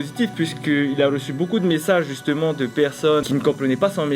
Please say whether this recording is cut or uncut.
uncut